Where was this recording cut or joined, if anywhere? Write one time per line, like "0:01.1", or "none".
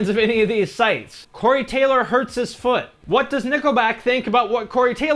0:02.9